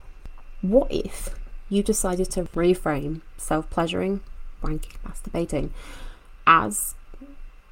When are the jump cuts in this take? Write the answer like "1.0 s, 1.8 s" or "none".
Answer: 2.5 s